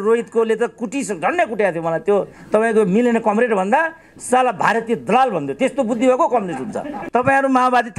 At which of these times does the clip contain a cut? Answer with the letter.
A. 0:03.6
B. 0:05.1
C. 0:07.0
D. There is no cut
C